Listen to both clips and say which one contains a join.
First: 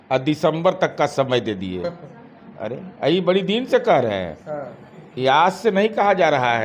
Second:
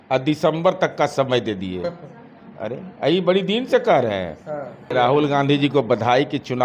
second; 1 cut; at 4.9 s

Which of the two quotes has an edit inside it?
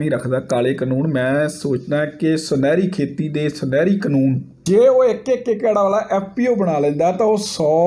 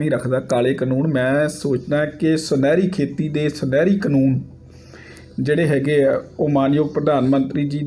first; 1 cut; at 4.5 s

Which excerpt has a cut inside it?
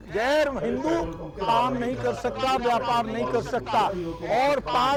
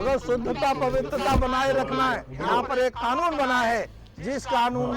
second; 1 cut; at 2.3 s

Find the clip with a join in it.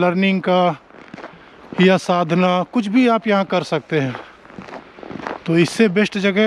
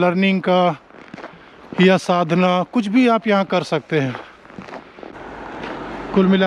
second; 1 cut; at 5.1 s

